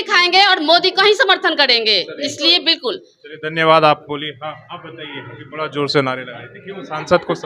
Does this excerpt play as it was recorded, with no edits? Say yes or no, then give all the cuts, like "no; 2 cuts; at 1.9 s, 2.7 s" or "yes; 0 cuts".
yes; 0 cuts